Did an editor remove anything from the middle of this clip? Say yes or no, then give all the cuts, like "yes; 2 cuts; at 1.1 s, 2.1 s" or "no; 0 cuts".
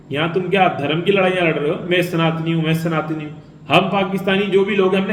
no; 0 cuts